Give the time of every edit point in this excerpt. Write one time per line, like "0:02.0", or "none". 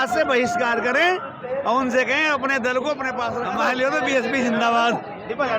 0:03.4